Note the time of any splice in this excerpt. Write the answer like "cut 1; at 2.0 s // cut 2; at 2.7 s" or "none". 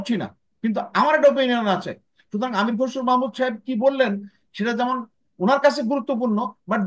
none